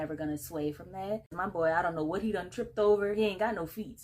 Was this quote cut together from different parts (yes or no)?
yes